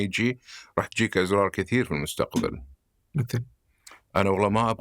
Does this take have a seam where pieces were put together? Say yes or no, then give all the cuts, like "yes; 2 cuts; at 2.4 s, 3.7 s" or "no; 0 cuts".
no; 0 cuts